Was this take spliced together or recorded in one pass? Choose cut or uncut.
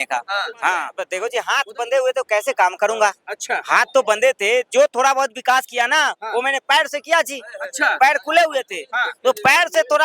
cut